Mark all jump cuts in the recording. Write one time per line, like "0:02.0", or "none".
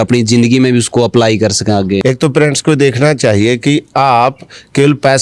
0:02.0